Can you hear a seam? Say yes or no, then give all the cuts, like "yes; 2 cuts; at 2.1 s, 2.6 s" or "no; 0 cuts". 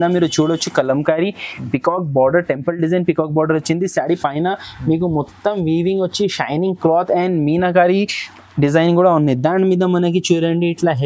no; 0 cuts